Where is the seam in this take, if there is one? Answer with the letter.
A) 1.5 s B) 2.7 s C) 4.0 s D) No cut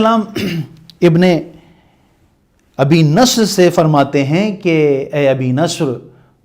D